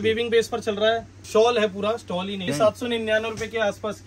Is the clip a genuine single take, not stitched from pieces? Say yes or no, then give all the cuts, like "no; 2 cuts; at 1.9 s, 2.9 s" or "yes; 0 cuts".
no; 2 cuts; at 1.1 s, 2.5 s